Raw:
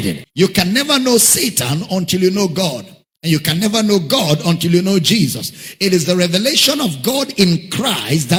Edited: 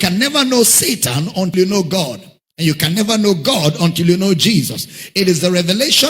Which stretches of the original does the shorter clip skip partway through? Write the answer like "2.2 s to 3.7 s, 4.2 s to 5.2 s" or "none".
2.1 s to 2.2 s